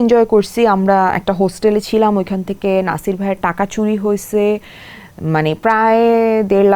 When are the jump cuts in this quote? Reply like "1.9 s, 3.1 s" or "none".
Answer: none